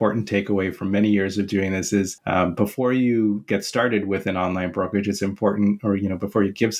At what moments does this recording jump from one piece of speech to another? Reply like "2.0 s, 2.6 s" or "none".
2.2 s